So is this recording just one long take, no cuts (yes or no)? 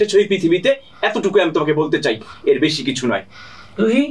yes